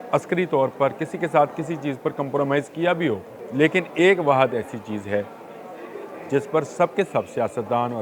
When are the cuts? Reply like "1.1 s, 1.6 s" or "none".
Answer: 3.4 s